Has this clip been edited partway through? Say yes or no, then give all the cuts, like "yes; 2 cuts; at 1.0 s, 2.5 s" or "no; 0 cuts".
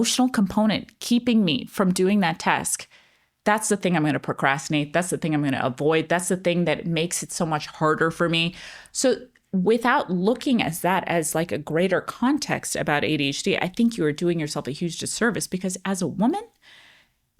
no; 0 cuts